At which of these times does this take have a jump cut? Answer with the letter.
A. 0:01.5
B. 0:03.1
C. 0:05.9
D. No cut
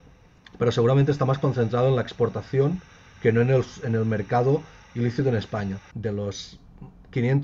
C